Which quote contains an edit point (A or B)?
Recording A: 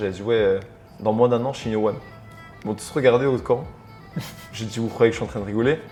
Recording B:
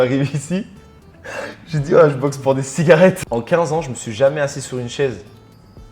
B